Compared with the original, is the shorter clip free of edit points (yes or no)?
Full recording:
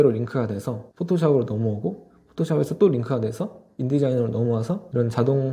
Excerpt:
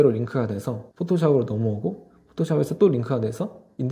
yes